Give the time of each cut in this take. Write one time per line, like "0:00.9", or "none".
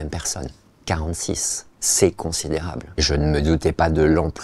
0:03.0